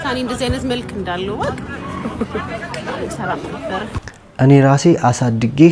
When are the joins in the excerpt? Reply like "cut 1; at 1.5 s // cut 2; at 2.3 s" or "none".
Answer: cut 1; at 4.0 s